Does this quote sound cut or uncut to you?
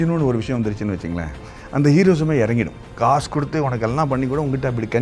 cut